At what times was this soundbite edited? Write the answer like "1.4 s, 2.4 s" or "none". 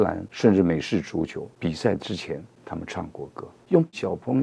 1.5 s, 2.5 s, 3.6 s